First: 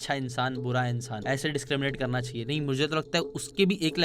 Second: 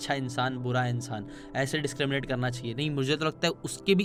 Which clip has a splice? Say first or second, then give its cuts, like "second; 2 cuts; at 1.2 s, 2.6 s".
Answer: first; 1 cut; at 1.1 s